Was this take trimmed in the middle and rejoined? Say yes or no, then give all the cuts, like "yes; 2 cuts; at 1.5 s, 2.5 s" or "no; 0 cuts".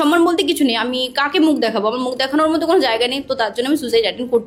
no; 0 cuts